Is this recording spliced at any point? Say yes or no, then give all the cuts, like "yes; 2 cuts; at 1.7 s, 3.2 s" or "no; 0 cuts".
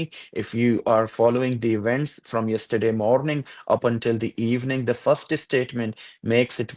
no; 0 cuts